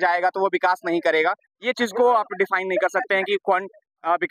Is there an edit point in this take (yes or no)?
no